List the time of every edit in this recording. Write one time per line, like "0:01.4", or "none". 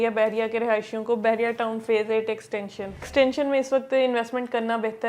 0:03.1